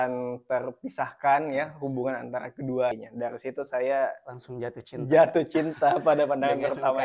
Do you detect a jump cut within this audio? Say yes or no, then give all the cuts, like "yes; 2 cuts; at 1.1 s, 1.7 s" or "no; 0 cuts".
yes; 1 cut; at 2.9 s